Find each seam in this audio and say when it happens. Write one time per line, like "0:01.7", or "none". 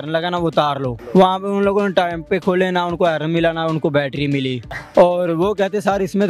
0:01.0
0:04.8